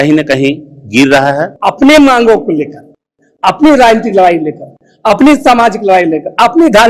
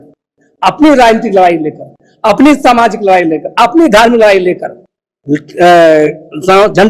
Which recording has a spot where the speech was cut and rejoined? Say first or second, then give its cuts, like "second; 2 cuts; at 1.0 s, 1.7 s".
first; 1 cut; at 1.5 s